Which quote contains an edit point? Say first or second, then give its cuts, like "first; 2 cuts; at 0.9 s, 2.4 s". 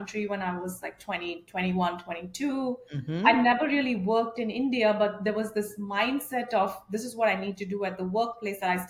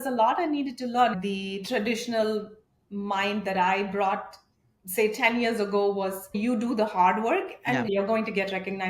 second; 3 cuts; at 1.2 s, 6.3 s, 7.9 s